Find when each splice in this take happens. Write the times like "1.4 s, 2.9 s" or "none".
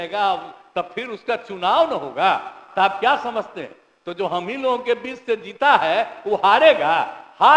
none

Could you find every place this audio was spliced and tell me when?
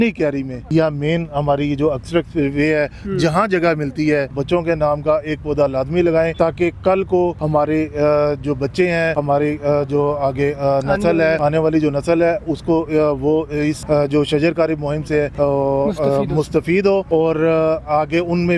none

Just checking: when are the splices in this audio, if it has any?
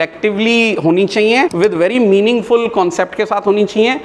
1.5 s

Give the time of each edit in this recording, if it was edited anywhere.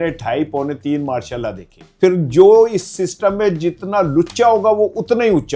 1.8 s

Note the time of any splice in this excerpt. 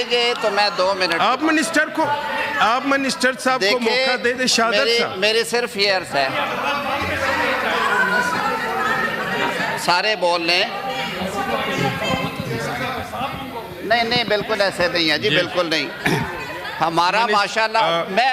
none

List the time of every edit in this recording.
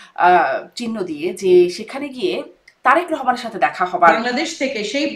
4.2 s

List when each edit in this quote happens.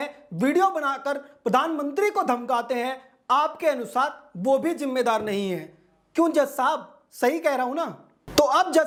none

